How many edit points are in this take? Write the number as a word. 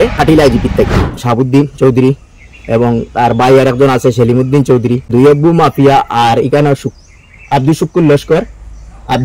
one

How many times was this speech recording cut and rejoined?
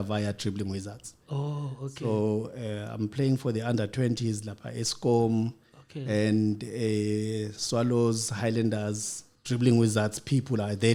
zero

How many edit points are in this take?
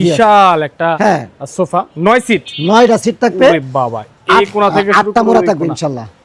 zero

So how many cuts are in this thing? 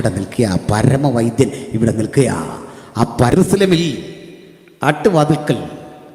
one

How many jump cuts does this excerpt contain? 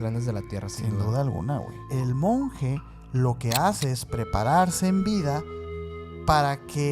one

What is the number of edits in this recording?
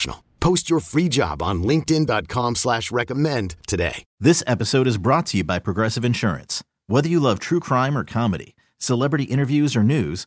one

